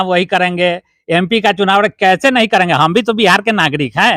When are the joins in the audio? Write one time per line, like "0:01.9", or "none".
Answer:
none